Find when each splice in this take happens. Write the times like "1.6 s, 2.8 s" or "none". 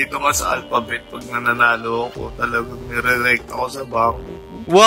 none